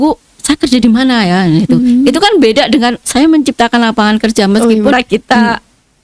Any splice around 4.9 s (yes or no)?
yes